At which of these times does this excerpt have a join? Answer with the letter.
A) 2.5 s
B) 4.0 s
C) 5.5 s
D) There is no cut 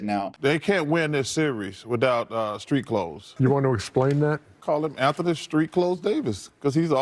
D